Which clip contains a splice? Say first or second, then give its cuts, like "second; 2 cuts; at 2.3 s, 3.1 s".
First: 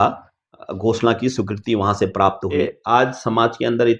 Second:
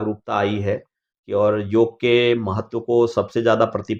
first; 1 cut; at 2.6 s